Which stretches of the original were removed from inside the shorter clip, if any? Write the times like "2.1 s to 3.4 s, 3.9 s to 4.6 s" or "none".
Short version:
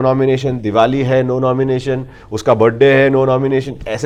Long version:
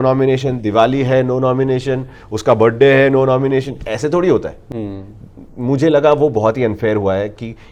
none